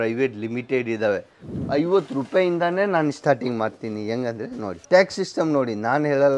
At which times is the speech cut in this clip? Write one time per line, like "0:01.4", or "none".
0:01.5
0:04.8